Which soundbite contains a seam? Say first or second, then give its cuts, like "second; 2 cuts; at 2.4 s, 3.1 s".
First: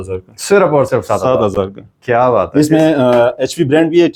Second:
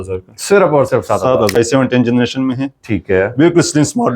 second; 1 cut; at 1.5 s